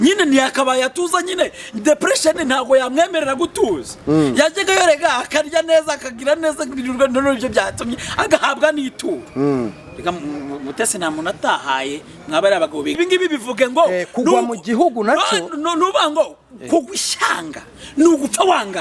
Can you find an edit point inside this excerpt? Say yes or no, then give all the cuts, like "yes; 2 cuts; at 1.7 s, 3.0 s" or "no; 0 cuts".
yes; 1 cut; at 13.0 s